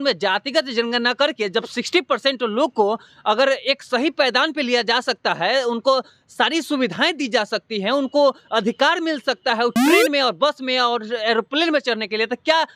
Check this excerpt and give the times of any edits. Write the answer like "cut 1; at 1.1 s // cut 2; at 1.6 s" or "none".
none